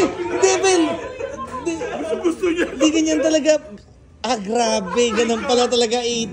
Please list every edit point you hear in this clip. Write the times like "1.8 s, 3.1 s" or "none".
none